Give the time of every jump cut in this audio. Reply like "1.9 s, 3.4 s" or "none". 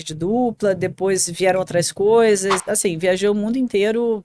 2.6 s